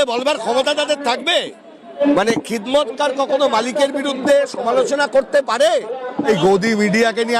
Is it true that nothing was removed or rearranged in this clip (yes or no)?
no